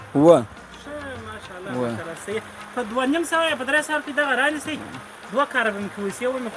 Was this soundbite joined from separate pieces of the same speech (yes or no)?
no